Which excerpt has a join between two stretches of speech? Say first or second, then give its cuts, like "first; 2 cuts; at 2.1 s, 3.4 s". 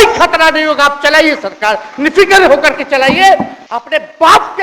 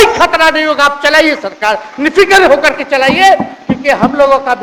first; 1 cut; at 3.5 s